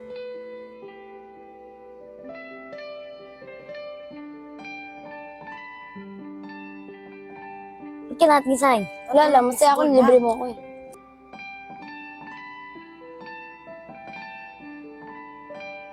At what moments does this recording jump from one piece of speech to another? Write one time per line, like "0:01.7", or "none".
0:11.0